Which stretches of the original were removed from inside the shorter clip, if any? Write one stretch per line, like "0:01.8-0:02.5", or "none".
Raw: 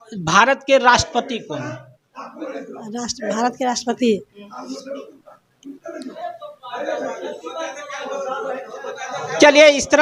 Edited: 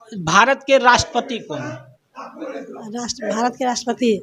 none